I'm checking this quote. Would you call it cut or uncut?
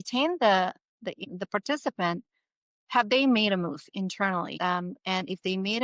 cut